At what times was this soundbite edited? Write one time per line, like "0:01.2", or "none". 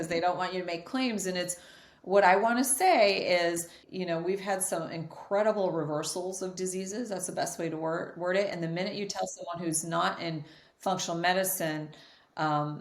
0:03.8